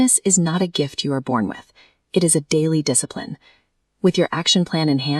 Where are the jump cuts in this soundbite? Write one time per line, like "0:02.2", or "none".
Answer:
none